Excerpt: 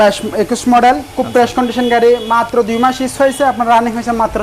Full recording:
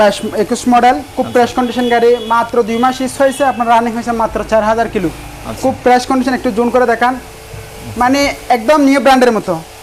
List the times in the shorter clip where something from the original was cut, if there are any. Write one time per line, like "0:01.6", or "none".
none